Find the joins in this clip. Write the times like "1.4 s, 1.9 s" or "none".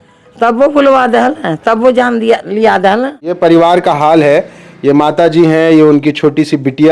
3.3 s